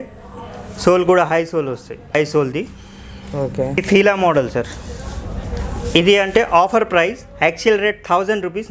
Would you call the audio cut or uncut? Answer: cut